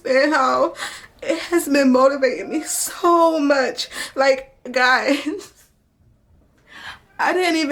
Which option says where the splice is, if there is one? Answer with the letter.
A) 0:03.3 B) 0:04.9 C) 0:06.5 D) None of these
D